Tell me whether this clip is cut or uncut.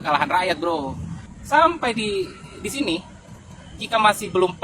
cut